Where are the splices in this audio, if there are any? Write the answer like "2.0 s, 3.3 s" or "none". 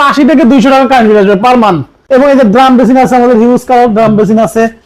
1.9 s